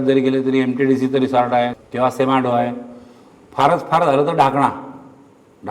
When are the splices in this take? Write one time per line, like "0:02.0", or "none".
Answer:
0:01.8